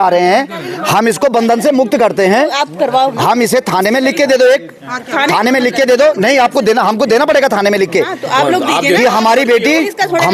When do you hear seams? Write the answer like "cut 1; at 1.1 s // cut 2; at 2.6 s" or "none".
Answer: none